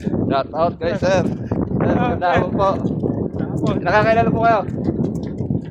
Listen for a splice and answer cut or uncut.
uncut